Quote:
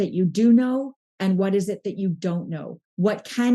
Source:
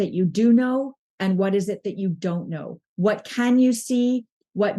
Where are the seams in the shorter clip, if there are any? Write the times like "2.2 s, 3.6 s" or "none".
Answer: none

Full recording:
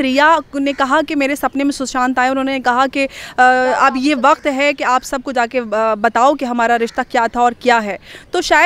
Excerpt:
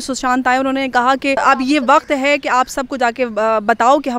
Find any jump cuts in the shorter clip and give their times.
1.4 s

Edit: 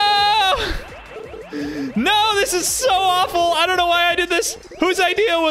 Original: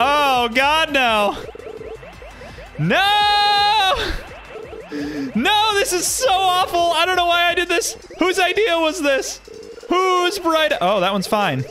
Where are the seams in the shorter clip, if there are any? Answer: none

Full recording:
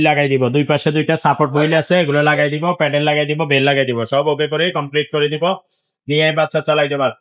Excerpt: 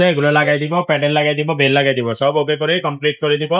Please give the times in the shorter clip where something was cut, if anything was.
none

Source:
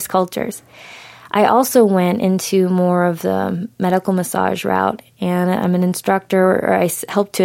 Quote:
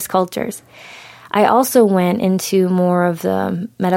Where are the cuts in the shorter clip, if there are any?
none

